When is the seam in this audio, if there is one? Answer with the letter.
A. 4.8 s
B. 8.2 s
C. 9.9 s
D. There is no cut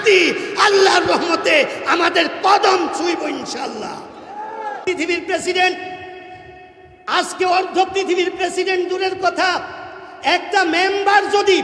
A